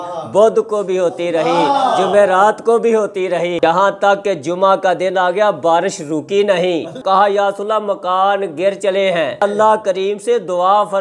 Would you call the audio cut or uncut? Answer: cut